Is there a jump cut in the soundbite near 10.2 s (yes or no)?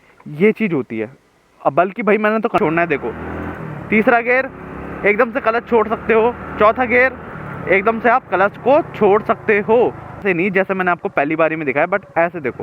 yes